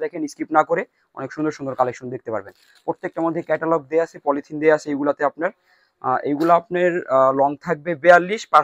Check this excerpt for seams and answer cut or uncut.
uncut